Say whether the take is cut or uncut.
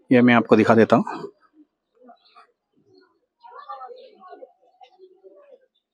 uncut